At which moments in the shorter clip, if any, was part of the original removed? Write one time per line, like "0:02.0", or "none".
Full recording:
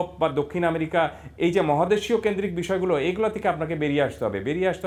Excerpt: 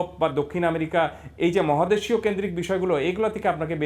none